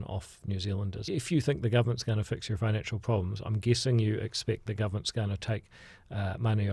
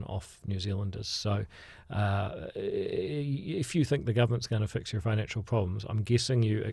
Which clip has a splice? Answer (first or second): first